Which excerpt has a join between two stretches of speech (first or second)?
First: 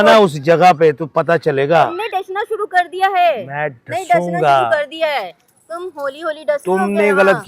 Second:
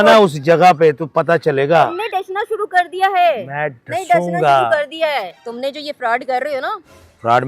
second